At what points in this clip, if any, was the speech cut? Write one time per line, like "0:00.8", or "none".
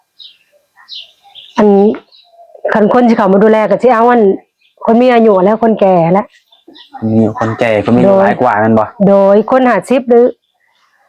none